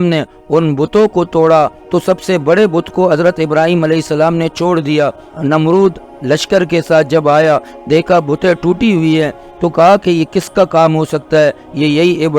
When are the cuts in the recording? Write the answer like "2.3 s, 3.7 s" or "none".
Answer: 1.8 s, 5.2 s